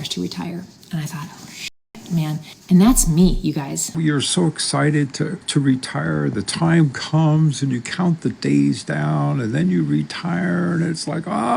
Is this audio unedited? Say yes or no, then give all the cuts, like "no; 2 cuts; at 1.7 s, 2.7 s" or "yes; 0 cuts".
no; 2 cuts; at 3.9 s, 5.4 s